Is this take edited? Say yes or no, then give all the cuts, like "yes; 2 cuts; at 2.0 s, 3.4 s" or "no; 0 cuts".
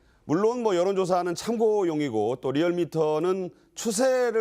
no; 0 cuts